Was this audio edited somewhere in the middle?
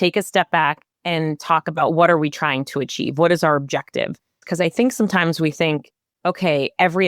yes; 2 cuts; at 0.9 s, 4.3 s

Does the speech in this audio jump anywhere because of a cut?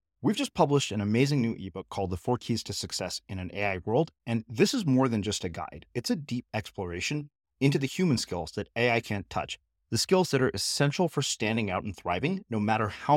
no; 0 cuts

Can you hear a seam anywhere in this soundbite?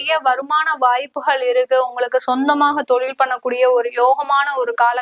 no; 0 cuts

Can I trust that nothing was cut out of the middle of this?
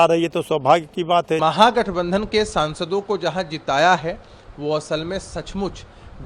no; 1 cut; at 1.4 s

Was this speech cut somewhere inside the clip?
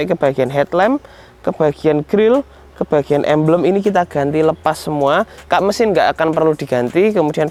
no; 0 cuts

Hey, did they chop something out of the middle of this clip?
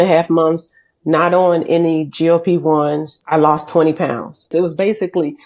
yes; 2 cuts; at 3.1 s, 4.5 s

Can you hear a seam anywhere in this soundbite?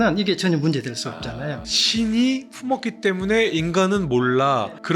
yes; 1 cut; at 1.6 s

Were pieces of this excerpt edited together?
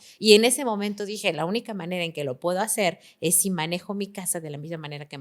no; 0 cuts

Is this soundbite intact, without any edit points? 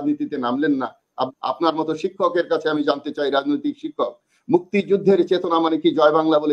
no; 1 cut; at 1.3 s

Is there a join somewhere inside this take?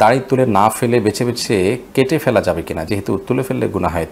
no; 0 cuts

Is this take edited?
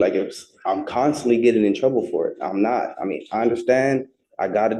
no; 0 cuts

